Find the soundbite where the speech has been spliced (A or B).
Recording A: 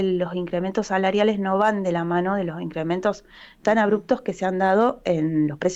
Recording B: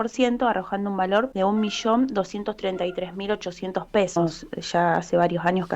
B